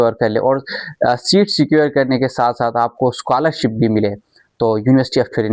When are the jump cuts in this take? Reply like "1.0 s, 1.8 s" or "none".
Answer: none

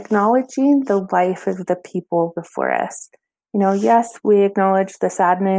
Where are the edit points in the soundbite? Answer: 4.2 s

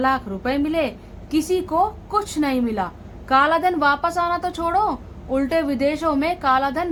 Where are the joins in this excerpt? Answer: none

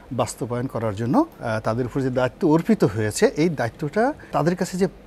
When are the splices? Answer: 1.4 s, 4.3 s

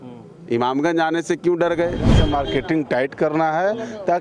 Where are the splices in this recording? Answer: 2.1 s

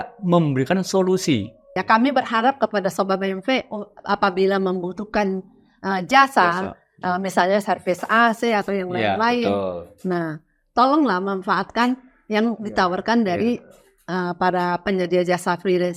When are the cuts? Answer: 1.8 s

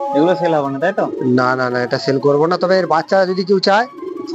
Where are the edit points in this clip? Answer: none

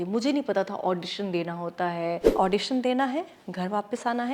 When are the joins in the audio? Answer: 2.2 s

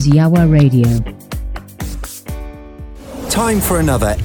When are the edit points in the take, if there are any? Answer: 2.8 s

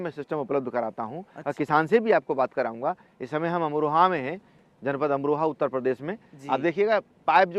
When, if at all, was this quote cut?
none

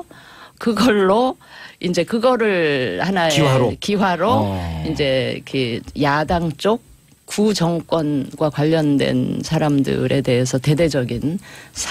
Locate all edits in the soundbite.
6.5 s

